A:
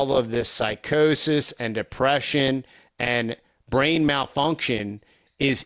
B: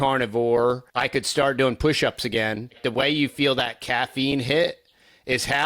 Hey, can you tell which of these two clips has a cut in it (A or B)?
B